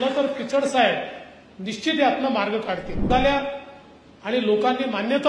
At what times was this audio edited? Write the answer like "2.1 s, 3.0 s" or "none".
3.1 s